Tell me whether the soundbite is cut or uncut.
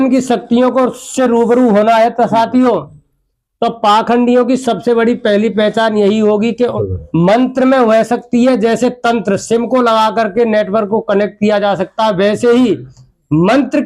cut